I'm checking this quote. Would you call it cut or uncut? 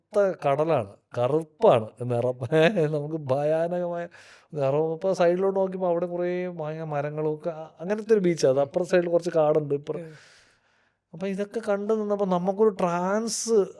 uncut